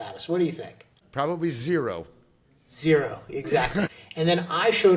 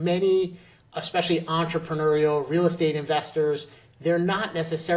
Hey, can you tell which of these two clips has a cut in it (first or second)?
first